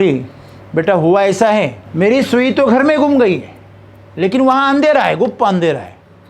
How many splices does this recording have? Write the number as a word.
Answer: one